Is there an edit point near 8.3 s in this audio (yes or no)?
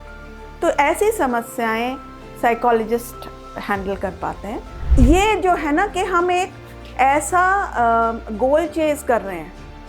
no